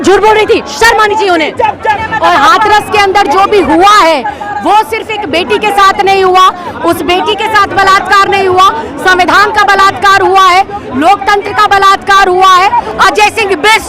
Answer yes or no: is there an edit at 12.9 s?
yes